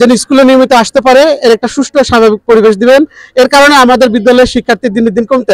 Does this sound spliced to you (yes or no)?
no